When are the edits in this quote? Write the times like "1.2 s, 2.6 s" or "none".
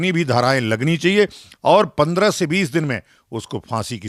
none